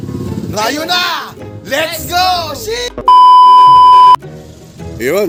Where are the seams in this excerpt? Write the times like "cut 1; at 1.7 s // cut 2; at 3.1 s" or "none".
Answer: none